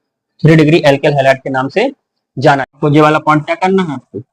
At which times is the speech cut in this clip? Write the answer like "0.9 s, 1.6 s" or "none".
2.7 s